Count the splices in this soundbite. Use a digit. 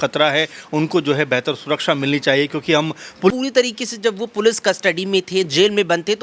1